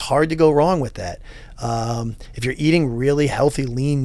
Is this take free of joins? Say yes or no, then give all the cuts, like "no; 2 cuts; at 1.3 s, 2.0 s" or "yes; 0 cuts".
yes; 0 cuts